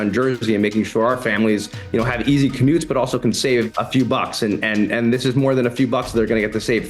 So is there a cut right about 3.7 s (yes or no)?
yes